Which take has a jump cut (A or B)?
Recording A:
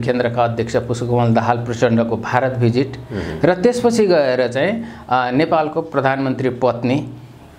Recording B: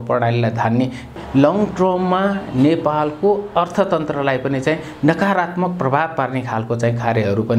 B